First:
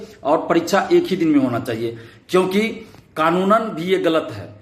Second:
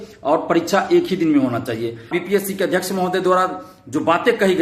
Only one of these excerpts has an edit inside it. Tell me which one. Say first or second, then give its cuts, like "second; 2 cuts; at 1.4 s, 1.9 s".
second; 1 cut; at 2.1 s